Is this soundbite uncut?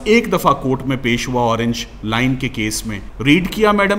no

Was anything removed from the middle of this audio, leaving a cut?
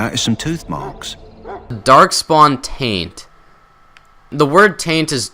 yes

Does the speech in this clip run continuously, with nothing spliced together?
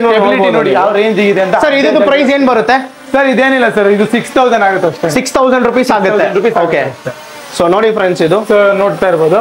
yes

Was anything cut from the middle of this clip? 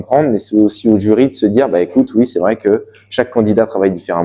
no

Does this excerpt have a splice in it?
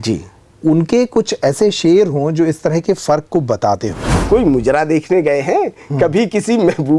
yes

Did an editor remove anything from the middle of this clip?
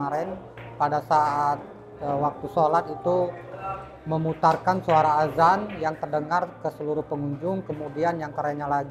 no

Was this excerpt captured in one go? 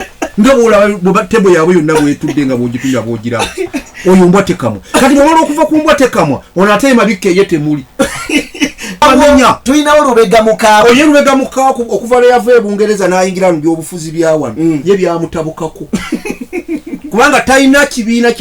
no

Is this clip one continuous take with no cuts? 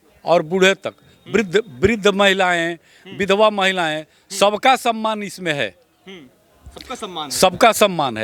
yes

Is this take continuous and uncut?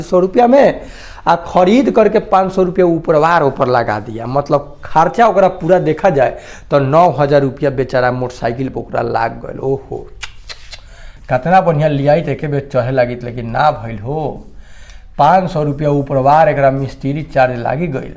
yes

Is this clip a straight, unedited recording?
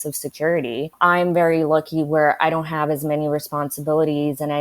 no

